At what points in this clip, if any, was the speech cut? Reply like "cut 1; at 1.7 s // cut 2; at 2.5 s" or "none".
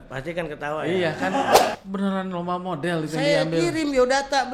cut 1; at 1.7 s